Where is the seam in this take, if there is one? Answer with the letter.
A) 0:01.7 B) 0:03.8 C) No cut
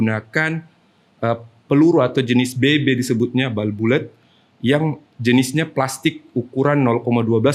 C